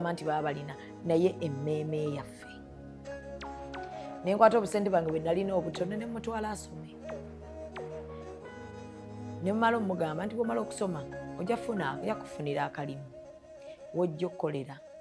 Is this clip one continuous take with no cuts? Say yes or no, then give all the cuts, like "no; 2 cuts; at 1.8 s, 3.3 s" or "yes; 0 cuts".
yes; 0 cuts